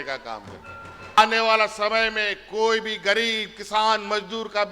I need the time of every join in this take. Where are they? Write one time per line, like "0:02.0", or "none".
0:01.2